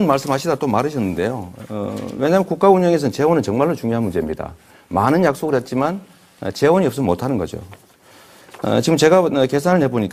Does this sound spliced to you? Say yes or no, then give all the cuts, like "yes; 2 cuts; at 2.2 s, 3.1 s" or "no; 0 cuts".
no; 0 cuts